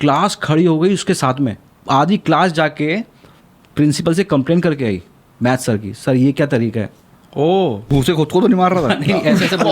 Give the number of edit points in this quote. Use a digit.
2